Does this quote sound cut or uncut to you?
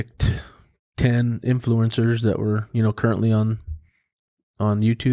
uncut